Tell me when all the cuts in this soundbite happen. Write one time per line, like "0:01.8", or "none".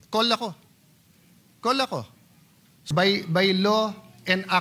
0:02.8